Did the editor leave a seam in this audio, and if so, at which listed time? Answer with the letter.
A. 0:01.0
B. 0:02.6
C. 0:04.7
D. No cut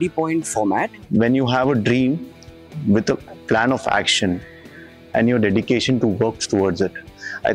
A